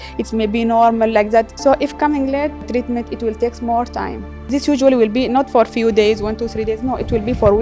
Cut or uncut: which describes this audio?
cut